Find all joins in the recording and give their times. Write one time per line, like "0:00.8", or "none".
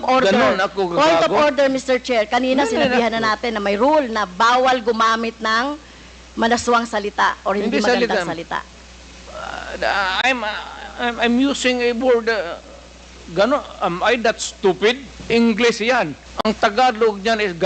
0:15.1
0:16.2